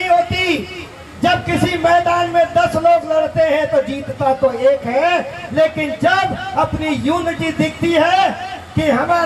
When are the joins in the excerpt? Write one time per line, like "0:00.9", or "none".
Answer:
none